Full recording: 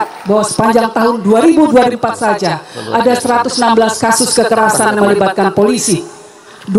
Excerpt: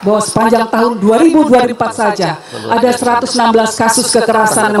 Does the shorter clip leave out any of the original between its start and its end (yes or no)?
no